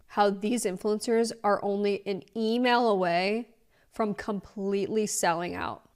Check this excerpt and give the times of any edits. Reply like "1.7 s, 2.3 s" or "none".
none